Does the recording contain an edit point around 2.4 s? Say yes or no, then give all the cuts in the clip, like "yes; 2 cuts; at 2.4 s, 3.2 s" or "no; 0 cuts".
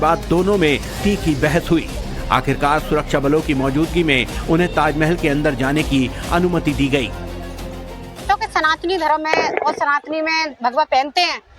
yes; 1 cut; at 2.4 s